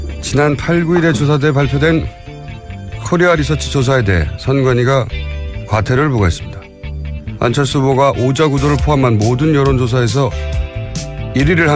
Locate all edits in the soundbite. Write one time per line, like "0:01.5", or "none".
none